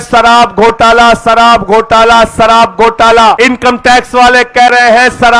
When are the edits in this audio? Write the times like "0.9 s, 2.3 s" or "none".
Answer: 3.4 s